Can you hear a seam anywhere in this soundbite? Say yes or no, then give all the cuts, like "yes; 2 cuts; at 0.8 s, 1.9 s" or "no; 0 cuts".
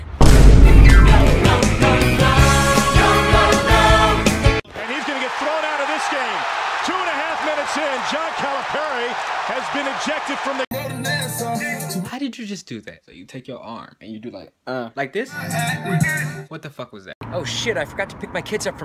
yes; 1 cut; at 6.0 s